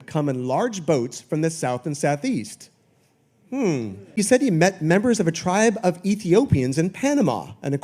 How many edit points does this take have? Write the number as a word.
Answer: one